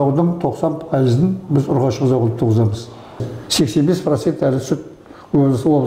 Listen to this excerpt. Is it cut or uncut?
cut